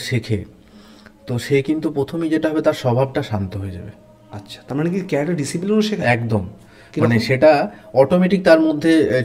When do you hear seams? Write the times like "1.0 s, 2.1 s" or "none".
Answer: none

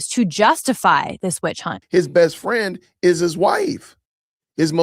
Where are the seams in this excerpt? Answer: 1.7 s

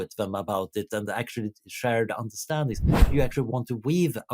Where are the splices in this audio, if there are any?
3.1 s

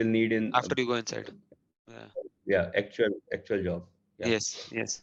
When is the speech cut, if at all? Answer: none

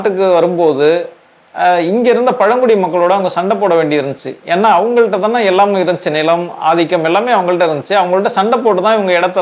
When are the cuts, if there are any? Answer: none

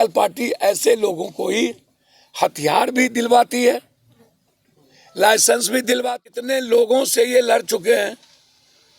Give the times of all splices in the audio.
6.0 s

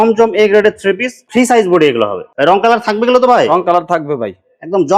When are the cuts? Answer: none

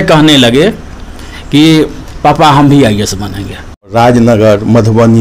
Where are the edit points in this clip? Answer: 3.9 s

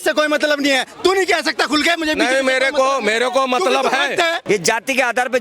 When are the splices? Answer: 4.4 s

